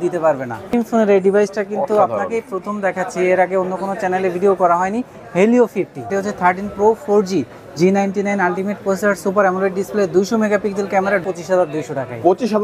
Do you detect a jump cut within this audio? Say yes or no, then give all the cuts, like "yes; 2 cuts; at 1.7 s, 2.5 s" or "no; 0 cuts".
yes; 3 cuts; at 0.7 s, 6.0 s, 11.2 s